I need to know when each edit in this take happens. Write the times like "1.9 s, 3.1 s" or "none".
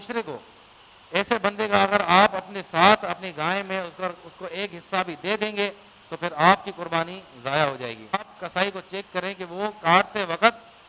8.4 s